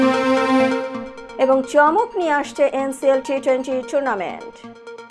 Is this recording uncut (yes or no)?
yes